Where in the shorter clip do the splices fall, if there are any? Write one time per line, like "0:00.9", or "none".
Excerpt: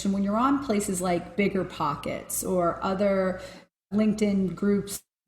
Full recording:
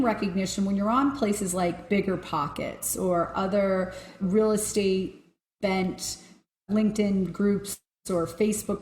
0:03.5

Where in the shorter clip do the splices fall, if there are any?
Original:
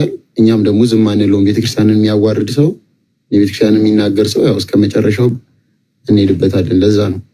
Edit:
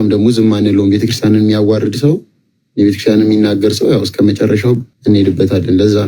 0:04.9

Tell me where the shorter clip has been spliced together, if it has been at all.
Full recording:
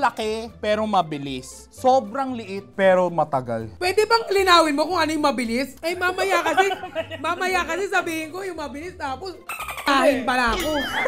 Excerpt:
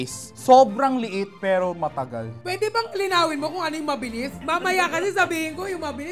0:04.4

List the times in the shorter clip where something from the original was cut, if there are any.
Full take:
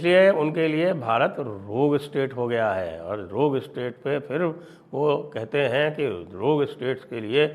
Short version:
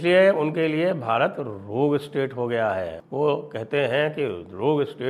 0:03.0

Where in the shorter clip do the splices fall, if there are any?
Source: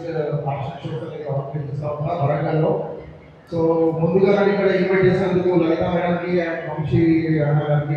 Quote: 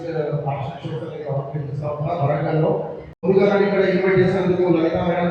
0:03.2

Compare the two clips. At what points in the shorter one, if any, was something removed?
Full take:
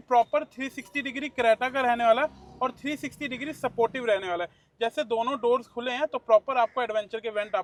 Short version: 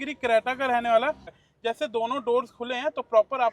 0:01.3

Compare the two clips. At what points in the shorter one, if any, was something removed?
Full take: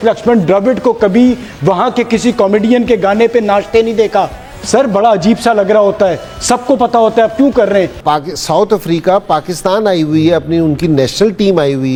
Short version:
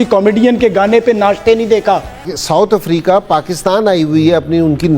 0:02.3

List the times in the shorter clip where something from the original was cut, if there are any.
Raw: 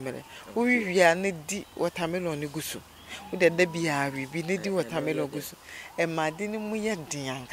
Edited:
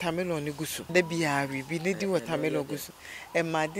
0:00.9

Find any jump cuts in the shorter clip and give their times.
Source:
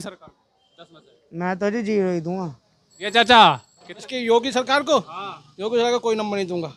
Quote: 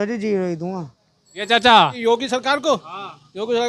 0:02.0

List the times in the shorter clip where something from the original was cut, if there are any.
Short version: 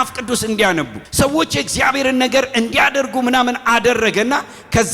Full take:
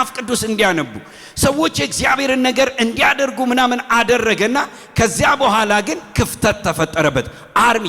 0:01.0

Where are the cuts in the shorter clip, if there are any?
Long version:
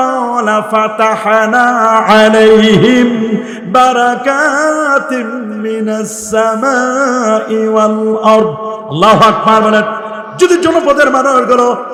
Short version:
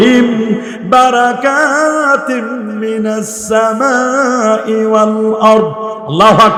none

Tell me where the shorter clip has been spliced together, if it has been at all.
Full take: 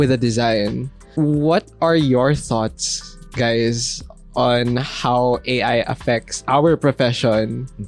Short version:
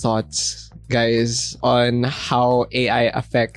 0:01.4

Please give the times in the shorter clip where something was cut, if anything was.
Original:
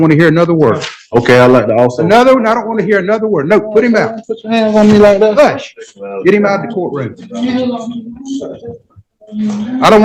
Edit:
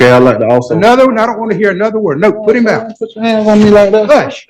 none

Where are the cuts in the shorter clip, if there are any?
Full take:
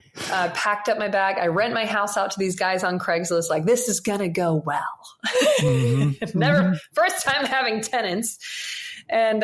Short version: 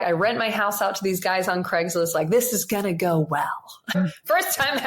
0:04.0

